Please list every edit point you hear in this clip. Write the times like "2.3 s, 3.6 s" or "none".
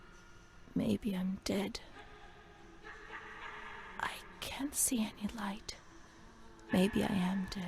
none